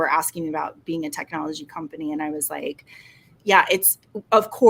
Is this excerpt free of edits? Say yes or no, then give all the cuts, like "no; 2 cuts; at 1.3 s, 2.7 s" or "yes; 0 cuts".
yes; 0 cuts